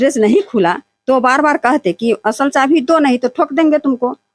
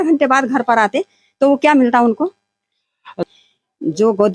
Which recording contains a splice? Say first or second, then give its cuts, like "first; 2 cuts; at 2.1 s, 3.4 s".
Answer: second; 1 cut; at 3.3 s